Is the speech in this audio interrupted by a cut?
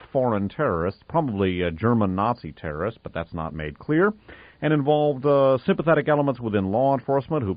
yes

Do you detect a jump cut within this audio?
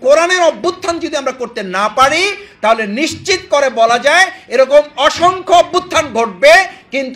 no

